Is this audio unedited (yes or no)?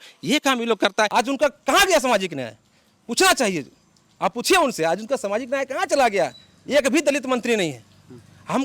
no